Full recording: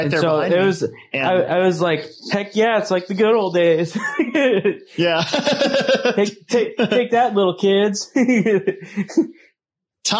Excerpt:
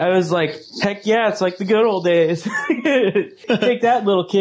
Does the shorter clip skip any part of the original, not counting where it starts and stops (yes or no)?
yes